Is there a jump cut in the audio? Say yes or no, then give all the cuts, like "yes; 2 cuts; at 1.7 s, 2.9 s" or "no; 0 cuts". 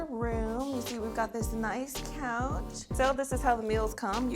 yes; 1 cut; at 2.9 s